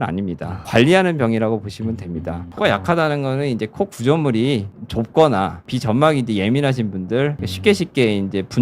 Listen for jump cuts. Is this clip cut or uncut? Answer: cut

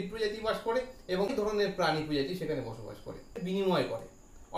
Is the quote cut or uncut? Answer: cut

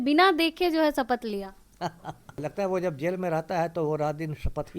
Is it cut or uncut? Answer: cut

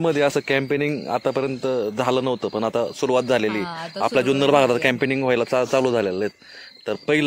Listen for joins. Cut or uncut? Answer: uncut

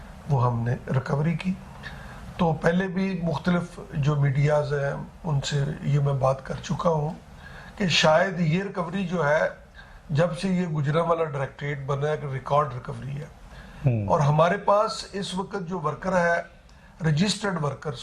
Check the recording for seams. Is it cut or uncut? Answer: uncut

